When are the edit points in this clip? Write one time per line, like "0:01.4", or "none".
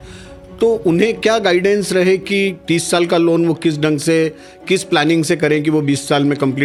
none